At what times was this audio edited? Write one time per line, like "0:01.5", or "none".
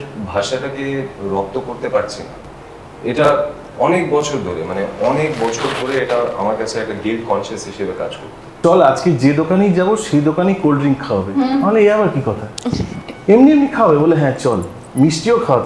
0:08.6